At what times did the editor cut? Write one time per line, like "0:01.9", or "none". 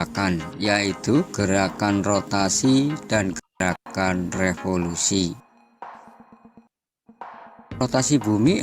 none